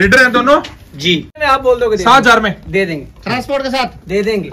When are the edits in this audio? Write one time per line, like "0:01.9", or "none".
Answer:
0:01.3

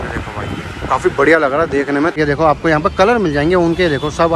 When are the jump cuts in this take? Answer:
0:02.2

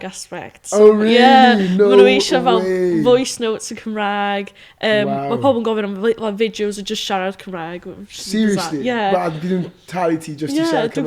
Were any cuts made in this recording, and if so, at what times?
none

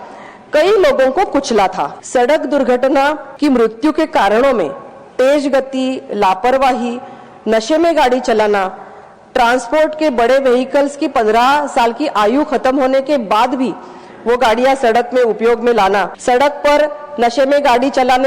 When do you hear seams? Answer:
0:02.0
0:03.3
0:16.1

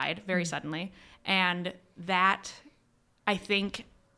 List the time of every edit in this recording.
none

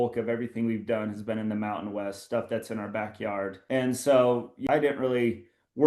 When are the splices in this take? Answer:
0:03.6
0:04.7

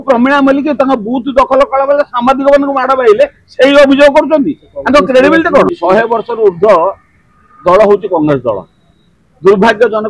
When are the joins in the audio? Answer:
0:05.7

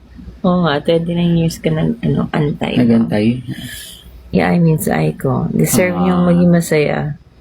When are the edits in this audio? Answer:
0:04.3

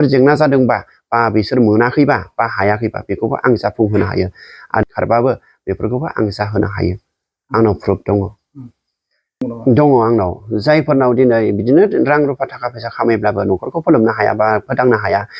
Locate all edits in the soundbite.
0:04.8
0:09.5

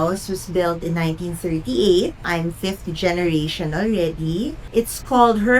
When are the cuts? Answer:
0:02.2
0:04.6

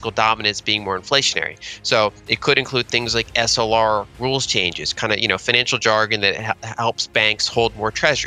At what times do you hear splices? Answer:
none

